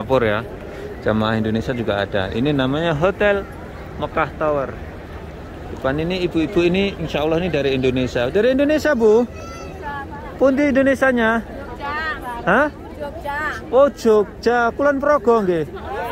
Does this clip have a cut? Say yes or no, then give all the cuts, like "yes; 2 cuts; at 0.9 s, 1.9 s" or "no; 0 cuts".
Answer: no; 0 cuts